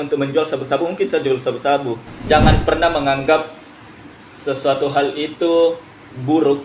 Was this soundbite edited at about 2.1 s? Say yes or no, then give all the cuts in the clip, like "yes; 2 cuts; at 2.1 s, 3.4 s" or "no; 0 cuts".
yes; 1 cut; at 2.1 s